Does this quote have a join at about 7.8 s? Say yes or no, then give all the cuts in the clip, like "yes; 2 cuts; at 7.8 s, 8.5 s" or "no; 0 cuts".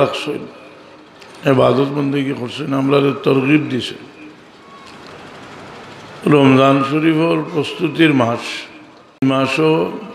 no; 1 cut; at 9.2 s